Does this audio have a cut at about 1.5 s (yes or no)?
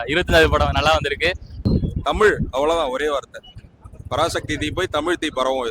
yes